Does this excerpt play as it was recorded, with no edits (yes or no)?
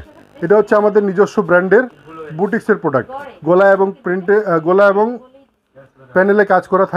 yes